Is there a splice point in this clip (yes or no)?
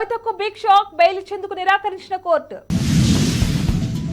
no